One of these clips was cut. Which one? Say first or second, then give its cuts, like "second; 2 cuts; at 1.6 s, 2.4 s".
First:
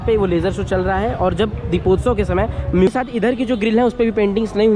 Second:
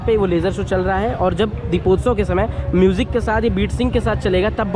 first; 1 cut; at 2.9 s